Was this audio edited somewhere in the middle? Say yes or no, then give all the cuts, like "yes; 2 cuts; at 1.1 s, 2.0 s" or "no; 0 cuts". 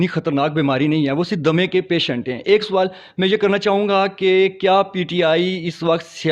no; 0 cuts